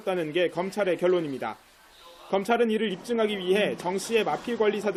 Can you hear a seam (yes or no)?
no